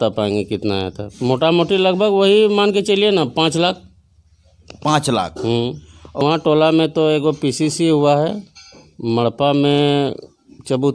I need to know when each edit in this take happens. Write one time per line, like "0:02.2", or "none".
0:06.2